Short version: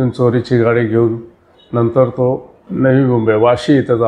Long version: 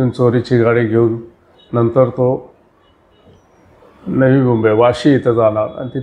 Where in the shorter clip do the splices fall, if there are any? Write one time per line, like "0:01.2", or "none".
0:02.6